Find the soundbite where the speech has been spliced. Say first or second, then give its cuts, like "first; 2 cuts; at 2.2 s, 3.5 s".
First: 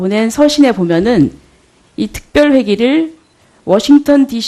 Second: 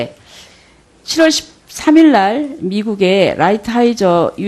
second; 1 cut; at 2.9 s